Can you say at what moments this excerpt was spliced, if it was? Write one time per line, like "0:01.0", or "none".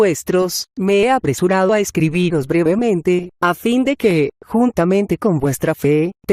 none